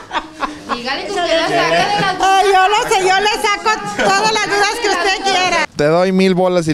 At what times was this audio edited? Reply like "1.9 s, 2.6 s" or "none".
5.7 s